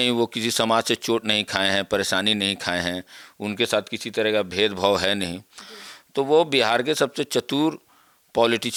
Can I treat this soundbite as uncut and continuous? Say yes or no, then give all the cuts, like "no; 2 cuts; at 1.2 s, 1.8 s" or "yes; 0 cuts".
yes; 0 cuts